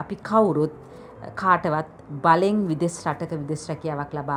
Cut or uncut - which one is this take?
uncut